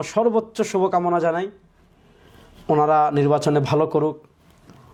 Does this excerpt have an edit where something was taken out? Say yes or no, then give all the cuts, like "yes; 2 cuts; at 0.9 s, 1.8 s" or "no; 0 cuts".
no; 0 cuts